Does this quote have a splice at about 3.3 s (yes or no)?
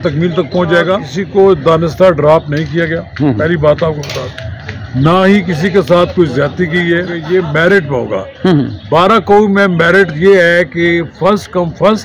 no